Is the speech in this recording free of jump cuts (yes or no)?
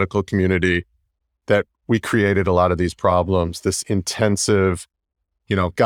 yes